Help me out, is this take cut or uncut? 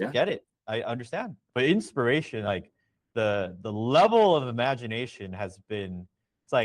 cut